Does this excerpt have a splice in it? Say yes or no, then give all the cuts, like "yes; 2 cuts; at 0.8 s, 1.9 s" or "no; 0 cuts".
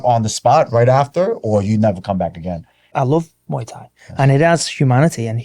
yes; 1 cut; at 2.7 s